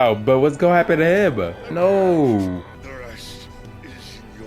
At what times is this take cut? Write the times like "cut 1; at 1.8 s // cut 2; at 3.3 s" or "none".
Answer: cut 1; at 1.6 s // cut 2; at 2.7 s

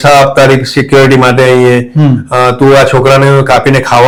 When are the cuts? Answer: none

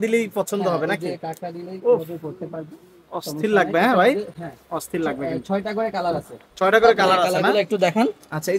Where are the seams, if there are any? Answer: none

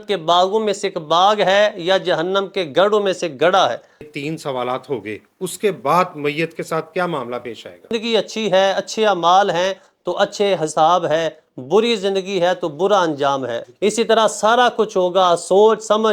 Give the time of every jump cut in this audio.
cut 1; at 4.2 s // cut 2; at 7.9 s // cut 3; at 13.7 s

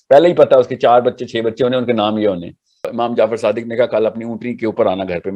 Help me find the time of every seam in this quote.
cut 1; at 2.9 s

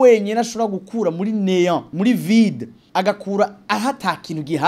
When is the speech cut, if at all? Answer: cut 1; at 1.9 s // cut 2; at 2.7 s // cut 3; at 3.6 s

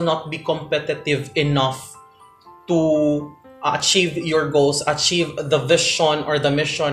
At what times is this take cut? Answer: none

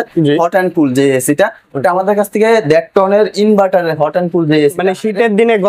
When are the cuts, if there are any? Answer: none

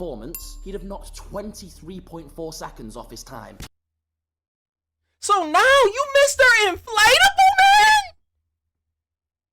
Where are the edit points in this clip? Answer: cut 1; at 3.6 s

